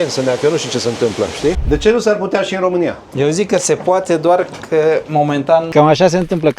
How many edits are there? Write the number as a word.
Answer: three